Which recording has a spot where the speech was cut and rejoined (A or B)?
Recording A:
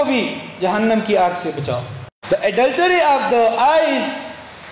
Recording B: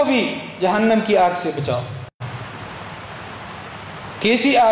A